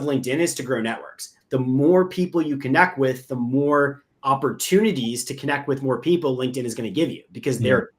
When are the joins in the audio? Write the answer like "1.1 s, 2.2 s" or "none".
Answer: 1.3 s, 4.1 s

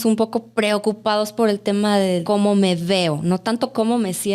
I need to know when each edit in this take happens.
2.2 s

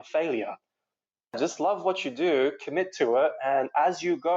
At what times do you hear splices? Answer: 1.4 s

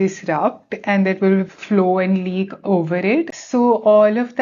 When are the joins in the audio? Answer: 3.3 s

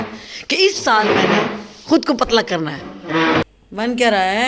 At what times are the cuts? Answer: 3.4 s

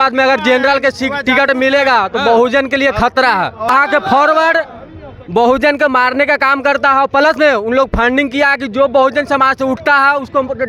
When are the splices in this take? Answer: 3.7 s

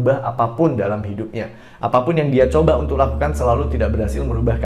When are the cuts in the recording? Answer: none

